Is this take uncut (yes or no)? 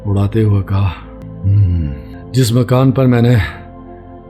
no